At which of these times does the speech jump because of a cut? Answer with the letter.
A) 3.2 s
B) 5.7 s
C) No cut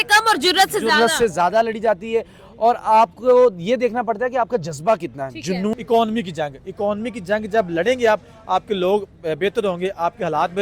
B